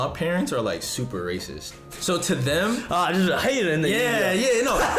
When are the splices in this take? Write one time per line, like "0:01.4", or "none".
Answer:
none